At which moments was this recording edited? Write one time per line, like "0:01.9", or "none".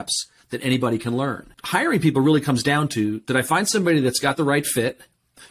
0:01.6